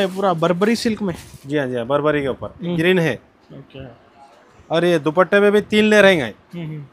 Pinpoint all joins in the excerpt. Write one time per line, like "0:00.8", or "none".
0:02.8